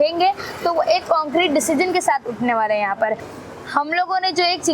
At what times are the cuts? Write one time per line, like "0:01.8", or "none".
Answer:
0:03.2